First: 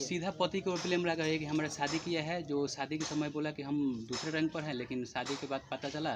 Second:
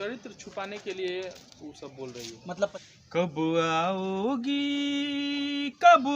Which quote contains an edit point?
second; 1 cut; at 2.7 s

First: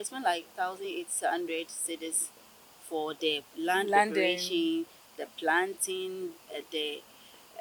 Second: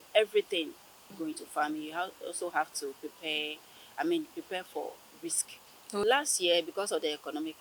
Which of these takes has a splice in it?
second; 2 cuts; at 1.1 s, 6.0 s

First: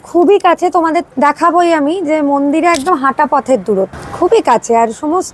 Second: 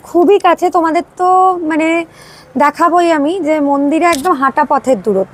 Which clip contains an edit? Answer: first; 2 cuts; at 1.1 s, 4.0 s

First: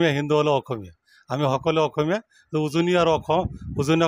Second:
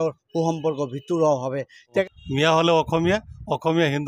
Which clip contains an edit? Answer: second; 1 cut; at 2.1 s

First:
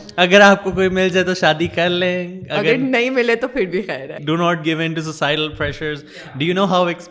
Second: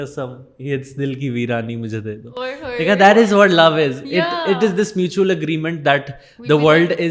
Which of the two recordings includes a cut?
first; 1 cut; at 4.1 s

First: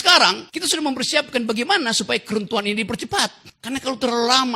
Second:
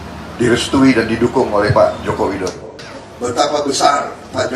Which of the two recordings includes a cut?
second; 1 cut; at 2.6 s

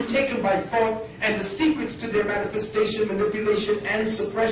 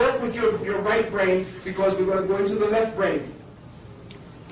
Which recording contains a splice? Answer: second; 1 cut; at 1.4 s

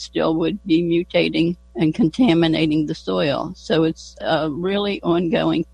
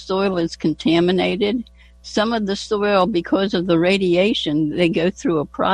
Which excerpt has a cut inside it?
first; 2 cuts; at 1.6 s, 4.2 s

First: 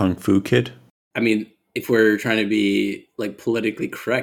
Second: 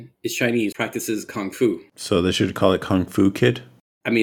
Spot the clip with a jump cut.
second; 2 cuts; at 0.7 s, 1.9 s

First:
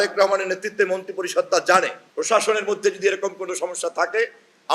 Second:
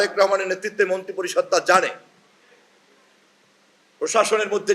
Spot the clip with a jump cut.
first; 1 cut; at 2.0 s

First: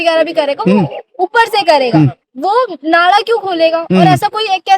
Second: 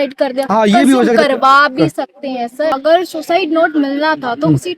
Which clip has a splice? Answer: second; 1 cut; at 2.8 s

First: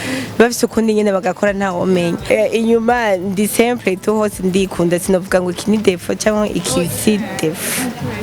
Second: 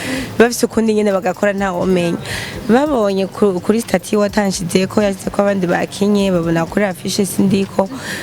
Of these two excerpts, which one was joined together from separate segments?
first; 1 cut; at 2.2 s

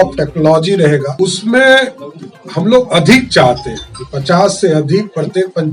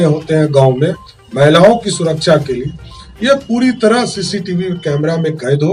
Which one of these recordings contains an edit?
first; 1 cut; at 1.1 s

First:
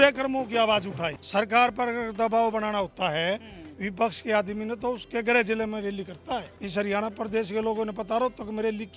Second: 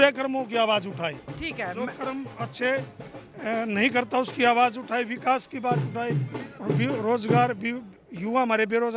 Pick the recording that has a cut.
first; 2 cuts; at 1.2 s, 6.6 s

